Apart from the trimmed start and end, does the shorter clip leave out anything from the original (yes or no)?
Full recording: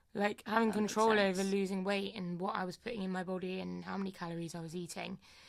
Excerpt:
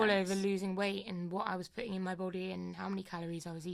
no